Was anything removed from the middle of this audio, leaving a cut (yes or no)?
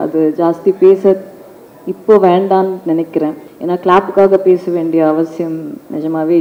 yes